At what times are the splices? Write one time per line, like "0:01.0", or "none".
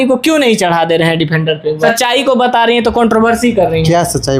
0:01.9